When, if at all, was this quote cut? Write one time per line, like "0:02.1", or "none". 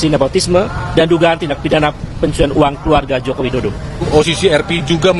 0:04.0